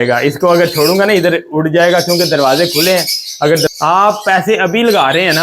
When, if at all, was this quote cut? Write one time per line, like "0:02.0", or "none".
0:03.7